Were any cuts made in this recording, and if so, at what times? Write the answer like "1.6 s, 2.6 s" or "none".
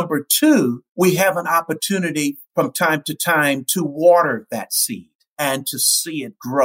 0.8 s, 2.4 s, 5.2 s

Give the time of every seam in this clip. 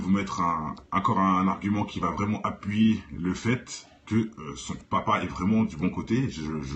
1.5 s

